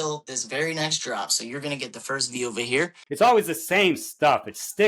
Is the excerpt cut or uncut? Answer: cut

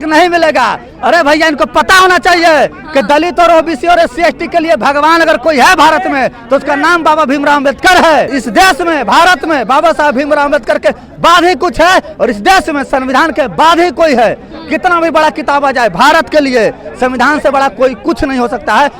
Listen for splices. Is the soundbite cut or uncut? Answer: uncut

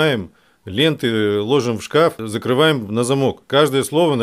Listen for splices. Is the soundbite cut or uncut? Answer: cut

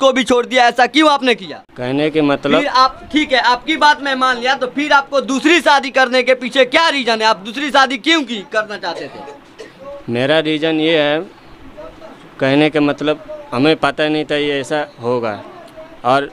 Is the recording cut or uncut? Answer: uncut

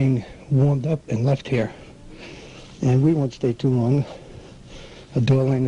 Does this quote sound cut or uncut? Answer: cut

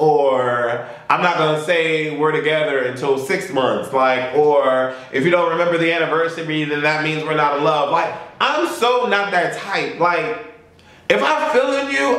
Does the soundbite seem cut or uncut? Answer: uncut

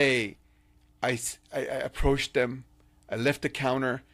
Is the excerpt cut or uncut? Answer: uncut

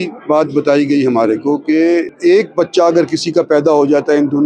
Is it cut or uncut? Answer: cut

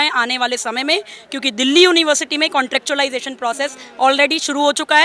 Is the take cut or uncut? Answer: uncut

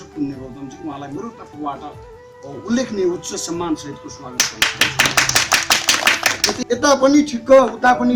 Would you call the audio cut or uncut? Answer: cut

